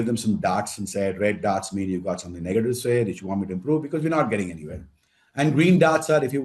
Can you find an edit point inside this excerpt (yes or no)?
no